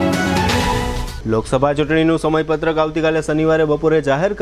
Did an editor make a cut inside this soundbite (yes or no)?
yes